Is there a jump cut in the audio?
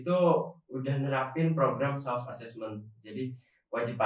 no; 0 cuts

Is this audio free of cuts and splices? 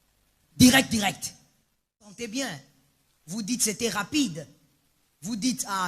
no; 1 cut; at 2.1 s

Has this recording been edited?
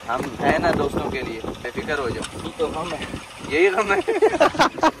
yes; 1 cut; at 2.5 s

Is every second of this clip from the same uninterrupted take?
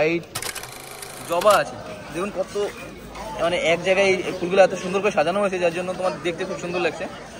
no; 1 cut; at 0.9 s

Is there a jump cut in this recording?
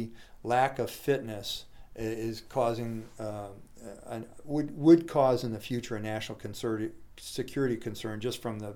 no; 0 cuts

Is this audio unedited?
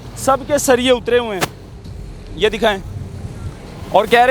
yes; 0 cuts

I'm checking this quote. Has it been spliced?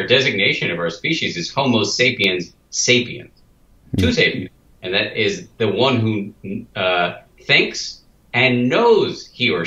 no; 0 cuts

